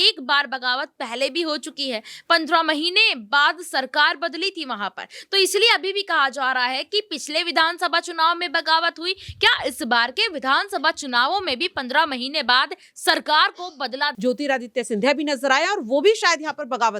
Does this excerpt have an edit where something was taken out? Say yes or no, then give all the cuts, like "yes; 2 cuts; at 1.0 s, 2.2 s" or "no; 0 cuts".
yes; 1 cut; at 14.1 s